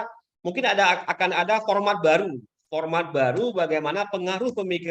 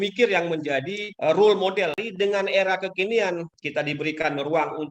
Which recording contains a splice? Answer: second; 3 cuts; at 1.0 s, 2.0 s, 3.5 s

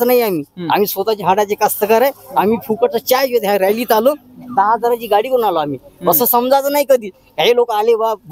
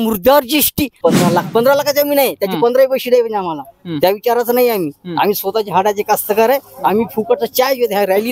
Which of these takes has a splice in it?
second; 1 cut; at 0.9 s

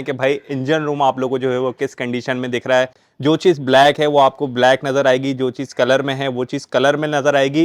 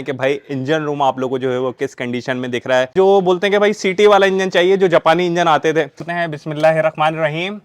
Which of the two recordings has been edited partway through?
second; 2 cuts; at 2.9 s, 6.1 s

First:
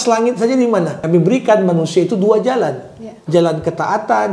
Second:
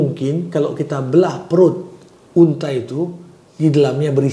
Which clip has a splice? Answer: first; 1 cut; at 1.0 s

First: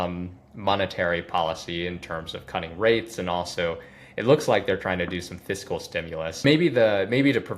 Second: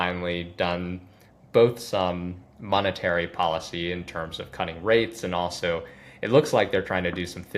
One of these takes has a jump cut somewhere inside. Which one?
first; 1 cut; at 6.4 s

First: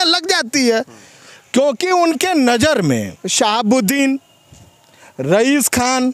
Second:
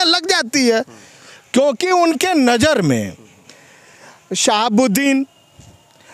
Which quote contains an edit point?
first; 1 cut; at 3.2 s

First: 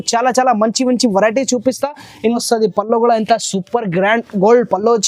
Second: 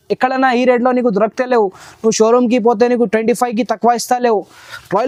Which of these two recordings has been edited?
first; 1 cut; at 2.4 s

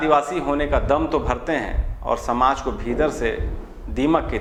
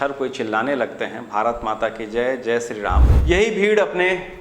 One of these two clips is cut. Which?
second; 1 cut; at 3.1 s

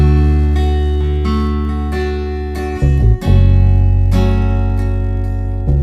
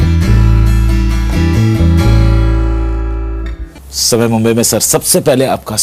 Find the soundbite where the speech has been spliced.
second; 1 cut; at 3.6 s

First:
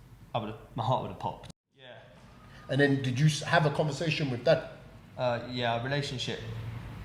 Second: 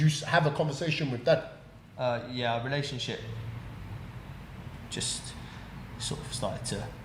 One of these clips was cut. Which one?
first; 1 cut; at 1.5 s

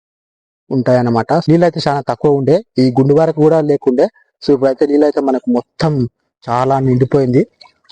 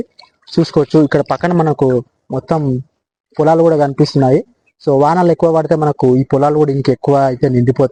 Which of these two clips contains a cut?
first; 1 cut; at 1.4 s

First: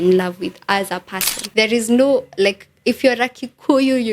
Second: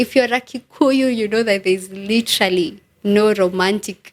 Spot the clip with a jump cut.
first; 1 cut; at 1.3 s

